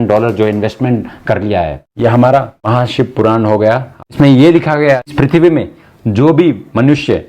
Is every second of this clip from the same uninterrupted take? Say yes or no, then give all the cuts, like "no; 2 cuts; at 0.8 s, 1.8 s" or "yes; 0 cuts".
no; 4 cuts; at 1.8 s, 2.6 s, 4.0 s, 5.1 s